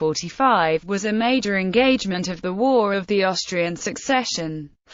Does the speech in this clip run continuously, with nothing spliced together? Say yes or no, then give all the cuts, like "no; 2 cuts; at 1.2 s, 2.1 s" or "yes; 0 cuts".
yes; 0 cuts